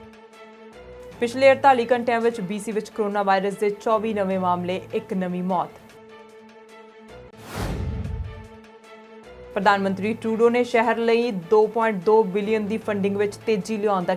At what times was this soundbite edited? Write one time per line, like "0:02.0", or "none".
0:01.0